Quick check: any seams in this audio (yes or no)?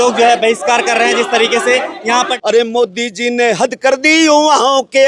yes